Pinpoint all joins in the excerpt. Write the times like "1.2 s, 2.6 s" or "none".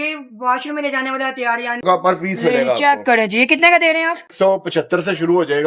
1.8 s, 4.3 s